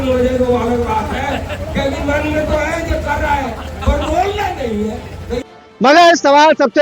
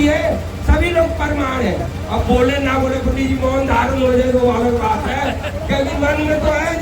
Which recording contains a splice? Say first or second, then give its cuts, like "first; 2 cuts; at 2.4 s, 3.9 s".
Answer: first; 1 cut; at 5.5 s